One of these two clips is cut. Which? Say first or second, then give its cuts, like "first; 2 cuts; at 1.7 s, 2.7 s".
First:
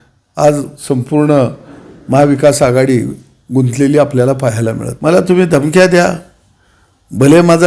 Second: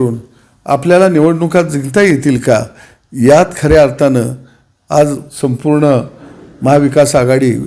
first; 1 cut; at 4.9 s